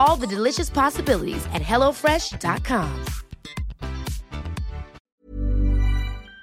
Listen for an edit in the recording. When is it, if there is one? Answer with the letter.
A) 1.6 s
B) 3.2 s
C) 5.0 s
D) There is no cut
C